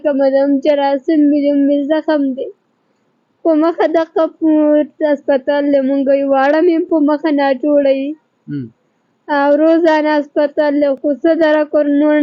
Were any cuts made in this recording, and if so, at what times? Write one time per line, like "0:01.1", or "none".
none